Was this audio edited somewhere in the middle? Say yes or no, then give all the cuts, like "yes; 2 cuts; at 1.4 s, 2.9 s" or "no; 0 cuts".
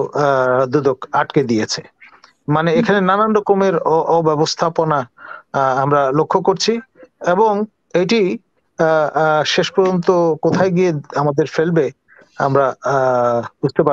no; 0 cuts